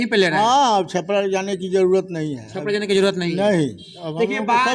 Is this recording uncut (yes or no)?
yes